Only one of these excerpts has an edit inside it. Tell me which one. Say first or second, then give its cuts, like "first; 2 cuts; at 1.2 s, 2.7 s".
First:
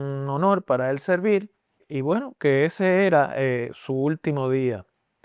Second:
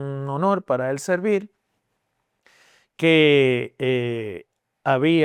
first; 1 cut; at 1.8 s